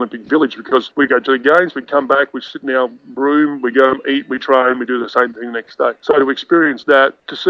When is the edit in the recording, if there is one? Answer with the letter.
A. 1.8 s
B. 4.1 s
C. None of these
C